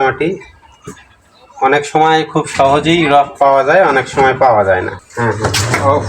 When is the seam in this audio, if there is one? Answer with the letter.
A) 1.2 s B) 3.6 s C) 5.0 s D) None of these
C